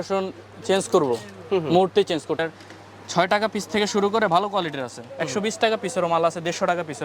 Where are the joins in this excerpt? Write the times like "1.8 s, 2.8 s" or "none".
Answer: 2.4 s